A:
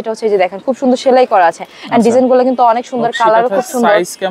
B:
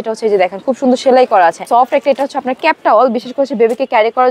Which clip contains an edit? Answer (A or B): B